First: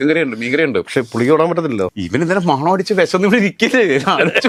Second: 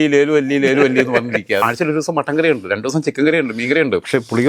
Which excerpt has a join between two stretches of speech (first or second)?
second